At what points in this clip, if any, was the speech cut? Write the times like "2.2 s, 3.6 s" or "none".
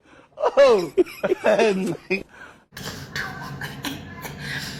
2.7 s